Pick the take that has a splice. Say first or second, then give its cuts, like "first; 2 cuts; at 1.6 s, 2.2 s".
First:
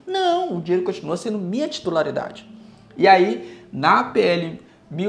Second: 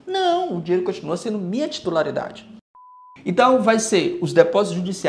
second; 1 cut; at 2.9 s